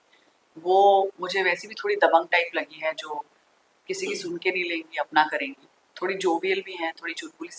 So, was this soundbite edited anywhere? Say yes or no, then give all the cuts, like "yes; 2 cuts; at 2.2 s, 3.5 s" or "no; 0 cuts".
no; 0 cuts